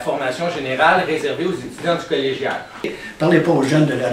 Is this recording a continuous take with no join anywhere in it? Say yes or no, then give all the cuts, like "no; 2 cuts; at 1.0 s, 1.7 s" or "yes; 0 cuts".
no; 1 cut; at 2.9 s